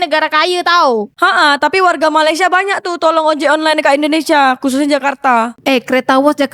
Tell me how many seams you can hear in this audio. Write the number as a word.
one